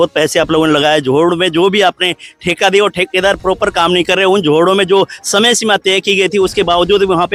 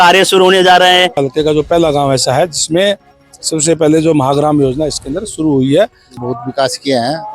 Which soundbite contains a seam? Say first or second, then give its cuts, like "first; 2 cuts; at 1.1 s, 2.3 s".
second; 2 cuts; at 1.2 s, 6.2 s